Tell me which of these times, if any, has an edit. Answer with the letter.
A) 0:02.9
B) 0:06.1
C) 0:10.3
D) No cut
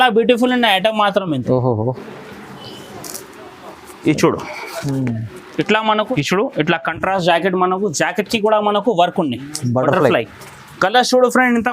B